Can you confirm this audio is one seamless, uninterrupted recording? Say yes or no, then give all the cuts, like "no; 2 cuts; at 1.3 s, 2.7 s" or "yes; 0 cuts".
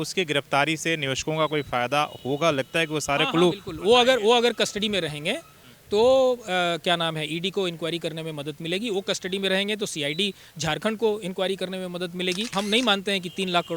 no; 1 cut; at 12.5 s